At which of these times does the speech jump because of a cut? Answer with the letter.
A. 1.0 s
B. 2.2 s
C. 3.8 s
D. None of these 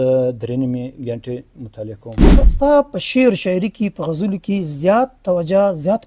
B